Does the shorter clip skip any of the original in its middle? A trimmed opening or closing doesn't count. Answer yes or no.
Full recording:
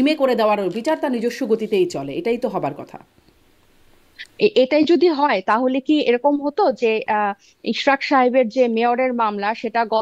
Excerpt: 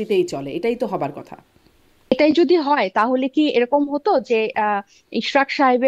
yes